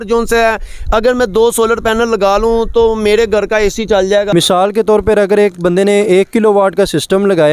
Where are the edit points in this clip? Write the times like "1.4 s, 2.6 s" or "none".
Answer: 4.3 s